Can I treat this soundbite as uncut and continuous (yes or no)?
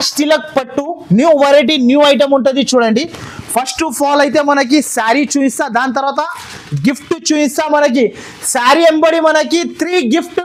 yes